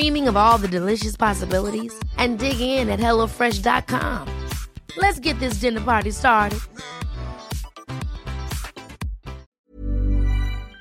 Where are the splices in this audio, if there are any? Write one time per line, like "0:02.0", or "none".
0:09.5

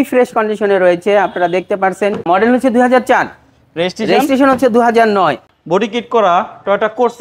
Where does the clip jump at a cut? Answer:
0:02.2
0:05.5

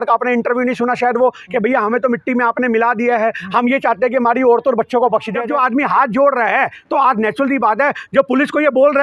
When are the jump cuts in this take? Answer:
0:05.3

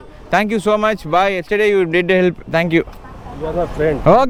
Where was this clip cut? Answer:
none

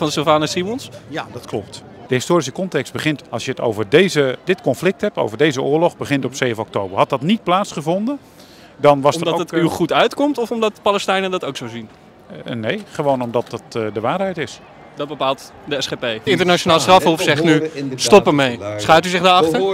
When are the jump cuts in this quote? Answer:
0:02.1
0:16.2

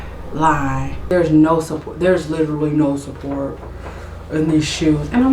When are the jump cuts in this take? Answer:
0:01.1

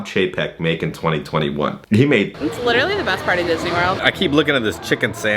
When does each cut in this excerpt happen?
0:02.3
0:04.0

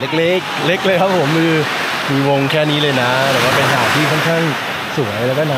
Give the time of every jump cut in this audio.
none

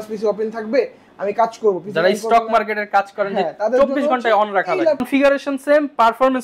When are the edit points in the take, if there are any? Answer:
0:05.0

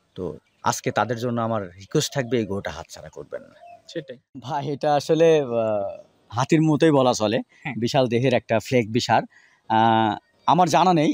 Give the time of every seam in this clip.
0:04.6

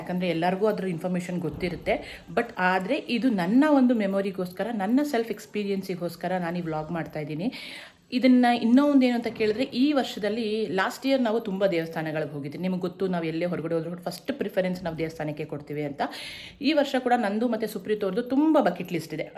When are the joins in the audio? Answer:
none

